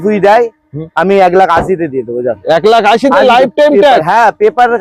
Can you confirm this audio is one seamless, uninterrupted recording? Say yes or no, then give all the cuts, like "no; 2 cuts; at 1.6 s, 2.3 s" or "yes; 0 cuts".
yes; 0 cuts